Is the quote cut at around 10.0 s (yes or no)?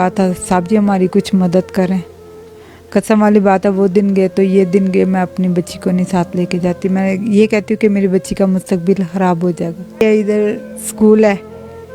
yes